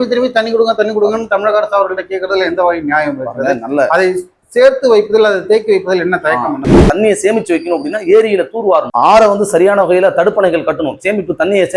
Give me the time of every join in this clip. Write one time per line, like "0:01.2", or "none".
0:06.8